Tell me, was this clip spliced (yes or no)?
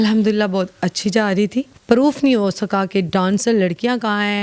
yes